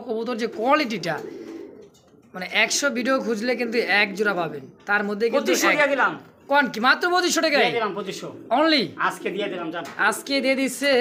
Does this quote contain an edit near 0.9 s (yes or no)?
no